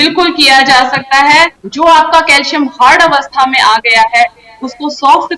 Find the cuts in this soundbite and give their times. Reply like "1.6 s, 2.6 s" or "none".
1.6 s